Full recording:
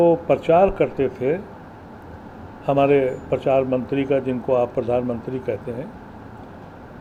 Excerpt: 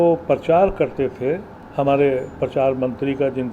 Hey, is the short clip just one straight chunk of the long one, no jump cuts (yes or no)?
no